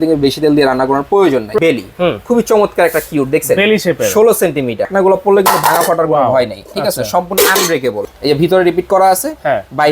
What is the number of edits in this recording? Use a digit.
3